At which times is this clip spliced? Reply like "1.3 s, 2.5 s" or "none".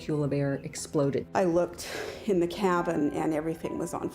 1.2 s